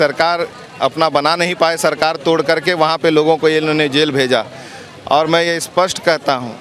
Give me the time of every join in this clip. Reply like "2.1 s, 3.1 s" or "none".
none